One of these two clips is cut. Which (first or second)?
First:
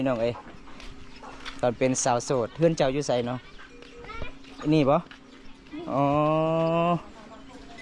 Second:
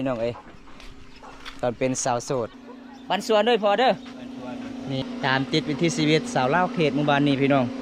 second